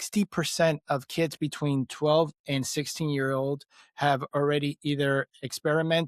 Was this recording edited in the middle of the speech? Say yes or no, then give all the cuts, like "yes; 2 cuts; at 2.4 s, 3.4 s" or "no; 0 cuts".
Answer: no; 0 cuts